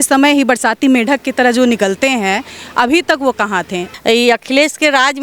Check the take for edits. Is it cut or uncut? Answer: cut